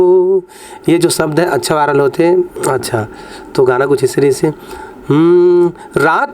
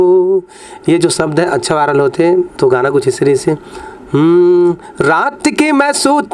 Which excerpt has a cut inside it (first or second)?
second